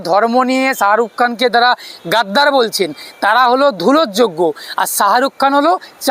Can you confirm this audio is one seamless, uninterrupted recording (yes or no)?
yes